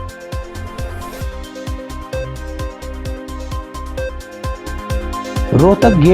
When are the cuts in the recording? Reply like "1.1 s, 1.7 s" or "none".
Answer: none